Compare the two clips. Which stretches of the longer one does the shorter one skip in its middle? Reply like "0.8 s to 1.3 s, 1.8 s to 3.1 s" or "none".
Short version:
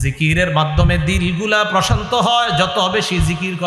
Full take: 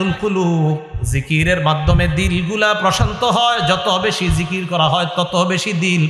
none